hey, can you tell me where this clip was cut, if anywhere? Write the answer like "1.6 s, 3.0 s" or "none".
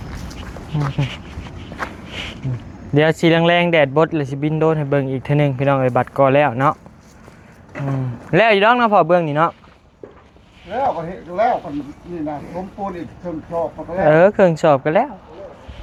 none